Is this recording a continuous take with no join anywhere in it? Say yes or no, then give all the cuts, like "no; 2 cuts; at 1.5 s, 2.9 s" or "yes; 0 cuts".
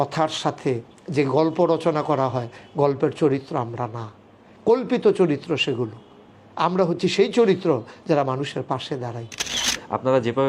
no; 1 cut; at 9.5 s